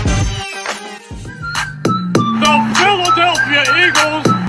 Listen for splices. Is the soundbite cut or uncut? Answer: cut